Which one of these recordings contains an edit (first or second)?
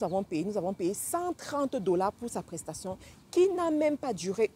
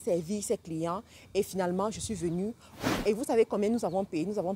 second